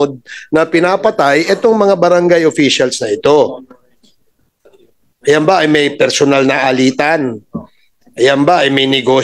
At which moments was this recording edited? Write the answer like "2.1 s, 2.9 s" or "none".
none